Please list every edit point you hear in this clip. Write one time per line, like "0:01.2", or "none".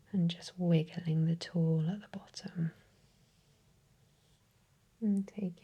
0:04.4